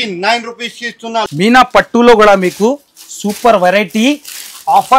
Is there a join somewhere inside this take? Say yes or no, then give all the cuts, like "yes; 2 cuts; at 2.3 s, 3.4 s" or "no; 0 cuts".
yes; 1 cut; at 1.3 s